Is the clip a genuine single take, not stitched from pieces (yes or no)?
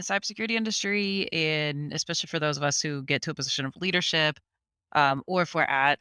yes